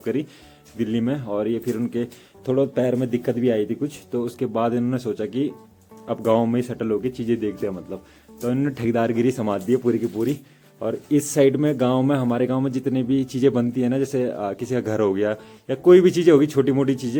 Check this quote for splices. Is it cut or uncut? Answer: uncut